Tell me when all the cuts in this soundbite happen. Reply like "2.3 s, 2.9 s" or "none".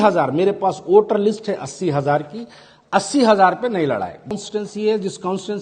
4.3 s